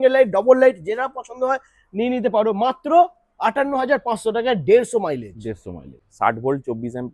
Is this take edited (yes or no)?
yes